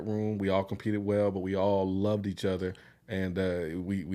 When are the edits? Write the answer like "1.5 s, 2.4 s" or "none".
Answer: none